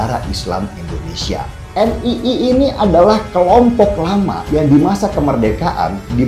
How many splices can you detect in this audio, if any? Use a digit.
0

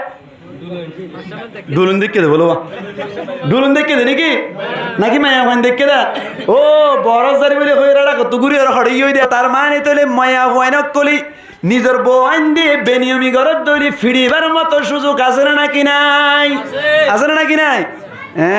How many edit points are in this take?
1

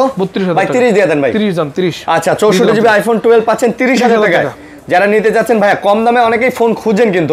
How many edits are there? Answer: 0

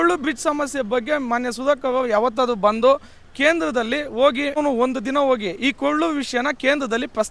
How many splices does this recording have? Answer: 1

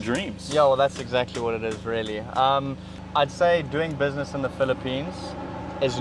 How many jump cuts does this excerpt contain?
1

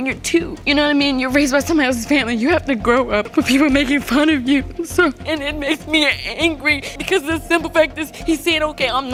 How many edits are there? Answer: 0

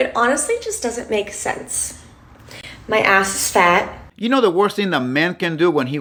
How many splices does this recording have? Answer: 0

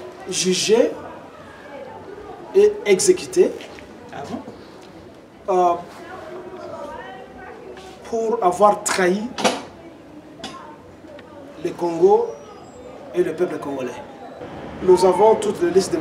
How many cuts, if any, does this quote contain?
1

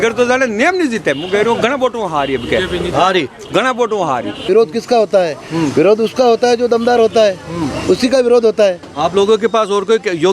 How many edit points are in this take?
1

